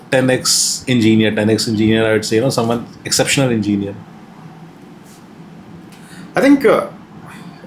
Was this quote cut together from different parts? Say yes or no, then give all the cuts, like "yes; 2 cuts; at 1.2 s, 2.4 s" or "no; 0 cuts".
no; 0 cuts